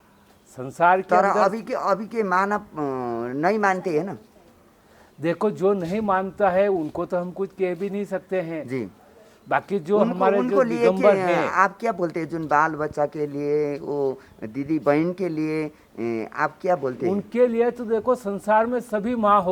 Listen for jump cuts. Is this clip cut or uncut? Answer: uncut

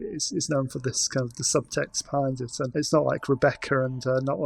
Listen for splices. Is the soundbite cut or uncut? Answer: cut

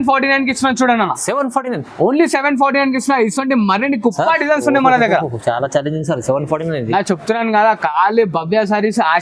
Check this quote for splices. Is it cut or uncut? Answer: uncut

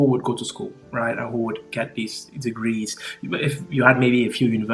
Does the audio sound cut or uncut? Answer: uncut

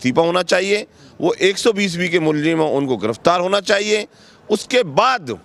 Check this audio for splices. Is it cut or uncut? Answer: uncut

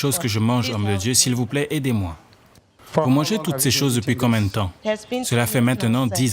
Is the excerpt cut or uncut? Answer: cut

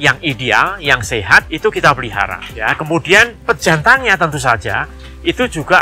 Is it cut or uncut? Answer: uncut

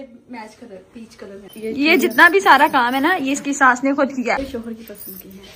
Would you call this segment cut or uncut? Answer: cut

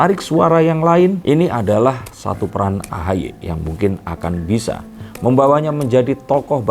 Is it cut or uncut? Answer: uncut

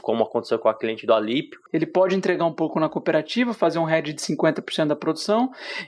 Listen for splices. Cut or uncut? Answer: cut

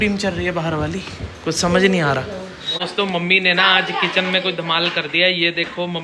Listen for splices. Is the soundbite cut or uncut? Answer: cut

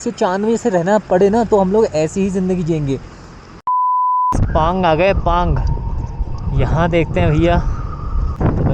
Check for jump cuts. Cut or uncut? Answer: uncut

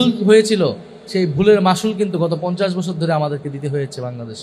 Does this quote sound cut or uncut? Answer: uncut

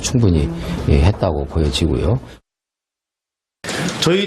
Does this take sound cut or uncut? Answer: uncut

